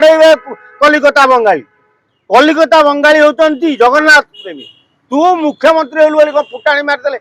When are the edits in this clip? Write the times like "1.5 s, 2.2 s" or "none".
none